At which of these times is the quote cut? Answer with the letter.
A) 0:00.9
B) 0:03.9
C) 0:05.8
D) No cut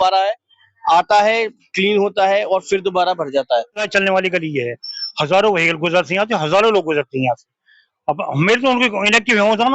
B